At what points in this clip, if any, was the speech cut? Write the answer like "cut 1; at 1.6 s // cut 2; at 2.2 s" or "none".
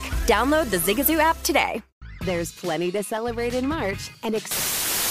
cut 1; at 1.9 s